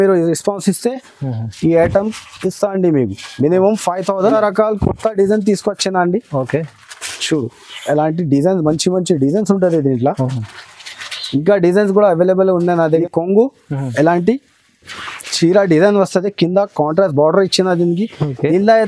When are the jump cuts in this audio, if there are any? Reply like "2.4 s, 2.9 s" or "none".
4.3 s, 13.0 s